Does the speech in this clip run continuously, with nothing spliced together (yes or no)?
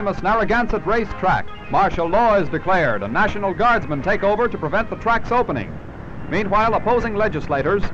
no